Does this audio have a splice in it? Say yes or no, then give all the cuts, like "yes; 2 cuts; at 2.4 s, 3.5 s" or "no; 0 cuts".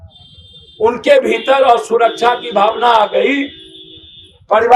no; 0 cuts